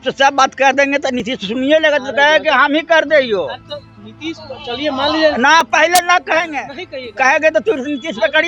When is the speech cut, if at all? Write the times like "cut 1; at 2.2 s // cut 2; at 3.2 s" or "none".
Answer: none